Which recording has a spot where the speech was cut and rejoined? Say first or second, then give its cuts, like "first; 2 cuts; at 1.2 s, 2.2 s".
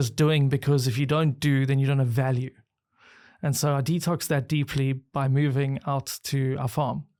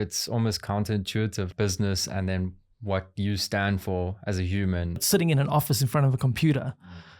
second; 2 cuts; at 1.5 s, 5.0 s